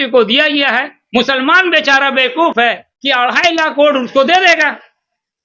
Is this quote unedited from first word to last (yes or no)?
no